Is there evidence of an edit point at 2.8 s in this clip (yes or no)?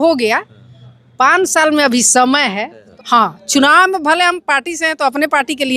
yes